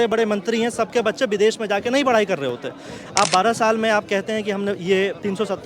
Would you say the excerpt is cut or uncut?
cut